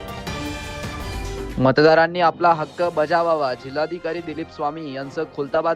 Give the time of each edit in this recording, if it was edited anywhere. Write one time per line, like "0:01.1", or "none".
0:01.0